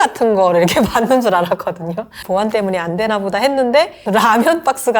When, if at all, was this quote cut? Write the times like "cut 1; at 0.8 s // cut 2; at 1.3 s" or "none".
cut 1; at 2.2 s // cut 2; at 4.0 s